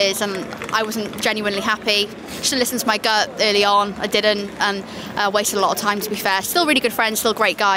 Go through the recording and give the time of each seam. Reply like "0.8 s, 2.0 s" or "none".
none

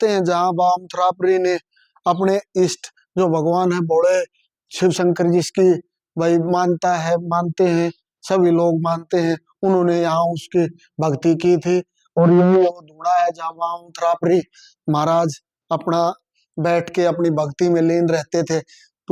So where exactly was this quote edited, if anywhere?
none

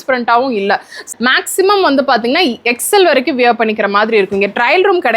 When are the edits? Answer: 1.0 s

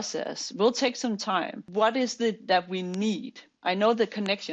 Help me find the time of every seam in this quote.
1.6 s

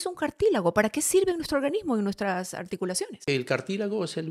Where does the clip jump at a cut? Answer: 3.2 s

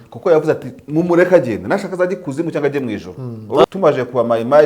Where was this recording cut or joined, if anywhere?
3.6 s

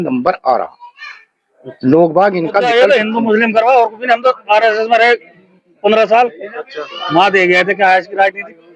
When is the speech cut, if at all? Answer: 2.6 s

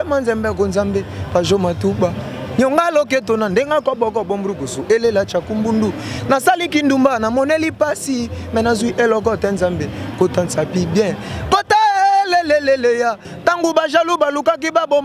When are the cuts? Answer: 13.3 s

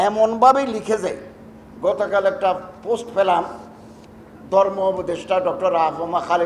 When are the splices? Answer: none

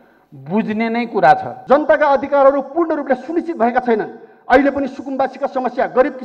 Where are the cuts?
1.5 s

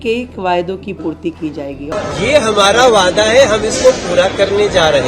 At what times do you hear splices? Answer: 1.8 s

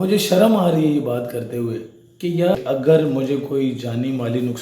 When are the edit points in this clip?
2.5 s

